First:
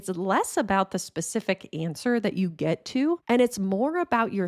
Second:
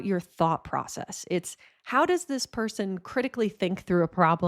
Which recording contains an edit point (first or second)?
first